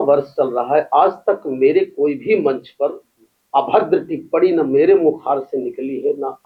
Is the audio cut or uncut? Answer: uncut